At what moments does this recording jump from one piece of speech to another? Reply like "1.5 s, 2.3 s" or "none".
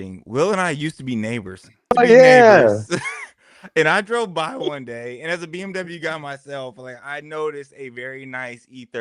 1.9 s

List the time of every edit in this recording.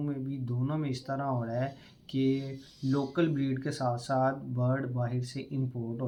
none

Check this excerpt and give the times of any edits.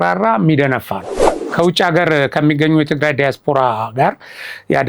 1.4 s

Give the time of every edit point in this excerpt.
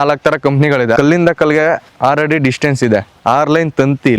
1.0 s

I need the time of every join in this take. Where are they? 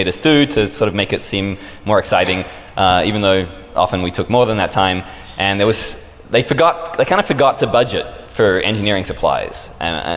2.1 s

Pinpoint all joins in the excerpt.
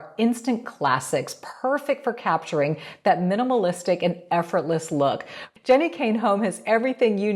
5.4 s

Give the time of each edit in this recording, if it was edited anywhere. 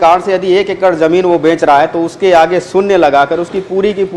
none

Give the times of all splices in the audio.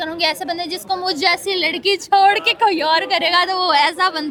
none

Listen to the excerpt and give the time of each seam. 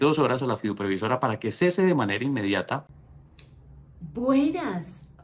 none

